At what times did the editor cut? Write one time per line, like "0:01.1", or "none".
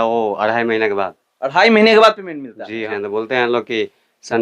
0:02.8